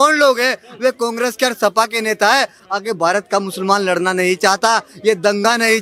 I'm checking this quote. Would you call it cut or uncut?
uncut